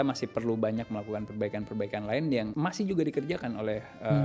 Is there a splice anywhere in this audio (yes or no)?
yes